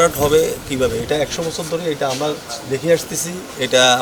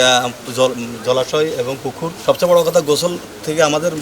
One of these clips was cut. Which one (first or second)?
second